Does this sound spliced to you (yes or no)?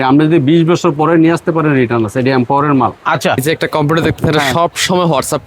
yes